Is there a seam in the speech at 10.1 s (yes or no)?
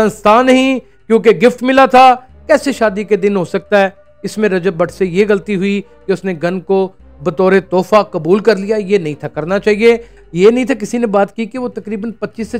yes